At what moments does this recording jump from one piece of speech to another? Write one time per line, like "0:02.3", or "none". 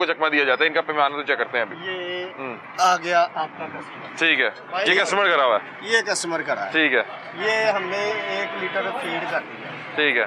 none